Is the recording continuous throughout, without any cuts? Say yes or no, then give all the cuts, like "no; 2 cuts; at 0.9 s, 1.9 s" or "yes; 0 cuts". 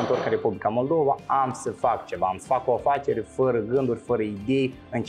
yes; 0 cuts